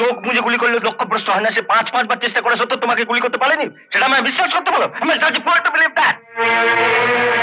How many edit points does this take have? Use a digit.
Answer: 0